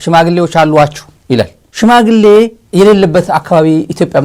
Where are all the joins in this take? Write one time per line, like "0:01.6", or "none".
none